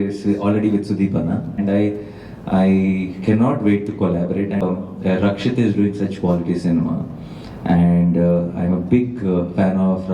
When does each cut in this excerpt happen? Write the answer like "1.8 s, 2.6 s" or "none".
1.6 s, 4.6 s